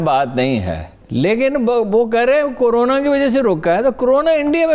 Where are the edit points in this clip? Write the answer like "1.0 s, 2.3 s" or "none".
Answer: 1.0 s